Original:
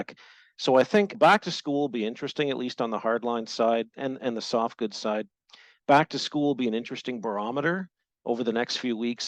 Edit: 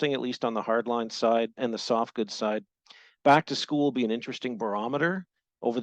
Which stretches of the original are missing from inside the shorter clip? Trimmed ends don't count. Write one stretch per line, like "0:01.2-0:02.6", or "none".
0:03.9-0:04.2